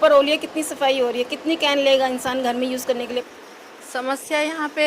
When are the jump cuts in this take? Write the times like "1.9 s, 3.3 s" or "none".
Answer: 3.2 s